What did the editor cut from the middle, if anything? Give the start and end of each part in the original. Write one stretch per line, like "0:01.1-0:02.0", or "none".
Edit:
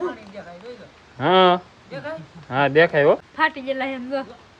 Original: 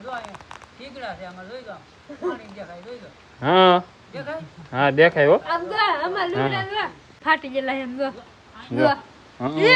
0:05.4-0:07.1